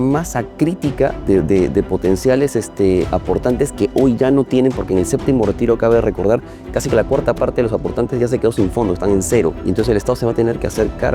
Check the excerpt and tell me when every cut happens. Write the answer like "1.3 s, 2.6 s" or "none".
1.2 s, 6.6 s, 9.6 s